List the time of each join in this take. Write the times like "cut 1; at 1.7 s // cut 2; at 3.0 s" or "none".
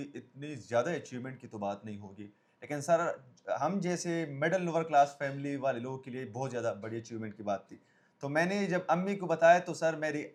none